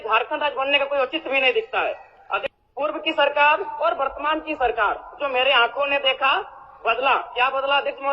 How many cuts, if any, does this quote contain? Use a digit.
1